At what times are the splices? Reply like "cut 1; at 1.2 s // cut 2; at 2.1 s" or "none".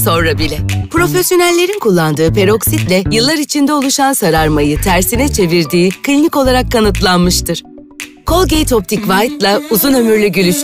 none